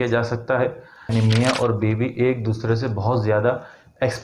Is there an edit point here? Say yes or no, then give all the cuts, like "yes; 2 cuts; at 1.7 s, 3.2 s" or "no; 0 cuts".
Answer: yes; 1 cut; at 1.0 s